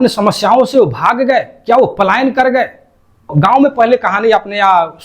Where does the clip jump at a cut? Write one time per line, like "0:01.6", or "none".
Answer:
0:03.3